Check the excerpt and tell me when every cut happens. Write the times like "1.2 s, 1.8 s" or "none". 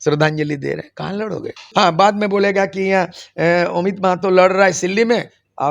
1.5 s